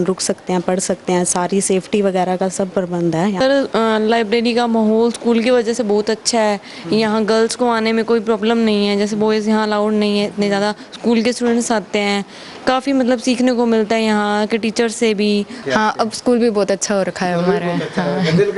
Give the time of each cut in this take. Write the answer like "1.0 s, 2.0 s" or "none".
3.4 s, 15.6 s